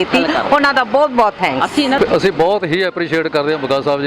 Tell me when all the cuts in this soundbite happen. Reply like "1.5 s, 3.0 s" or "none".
2.0 s